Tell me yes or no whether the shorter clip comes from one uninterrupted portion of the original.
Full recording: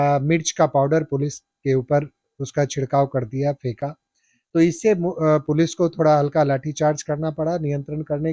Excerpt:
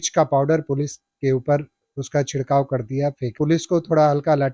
no